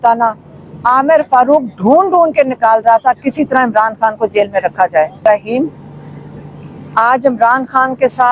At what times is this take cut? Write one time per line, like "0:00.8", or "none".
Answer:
0:05.1